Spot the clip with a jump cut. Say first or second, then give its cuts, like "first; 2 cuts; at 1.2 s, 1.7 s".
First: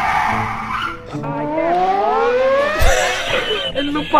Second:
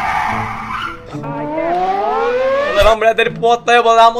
second; 1 cut; at 2.7 s